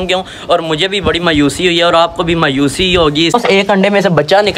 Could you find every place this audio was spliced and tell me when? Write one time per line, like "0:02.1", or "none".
0:03.3